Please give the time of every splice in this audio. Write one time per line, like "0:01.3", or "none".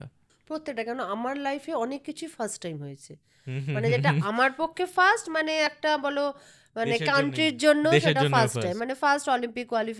none